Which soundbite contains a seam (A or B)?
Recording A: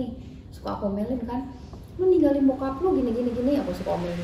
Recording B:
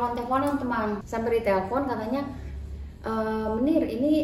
B